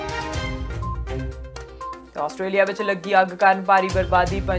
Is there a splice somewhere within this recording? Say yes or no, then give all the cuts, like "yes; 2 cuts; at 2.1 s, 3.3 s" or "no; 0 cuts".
no; 0 cuts